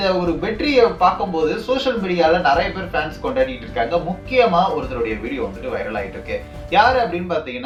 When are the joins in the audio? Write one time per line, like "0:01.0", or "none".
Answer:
none